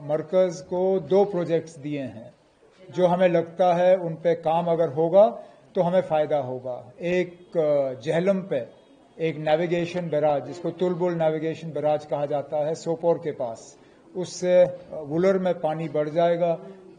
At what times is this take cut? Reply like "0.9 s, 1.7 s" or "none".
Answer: none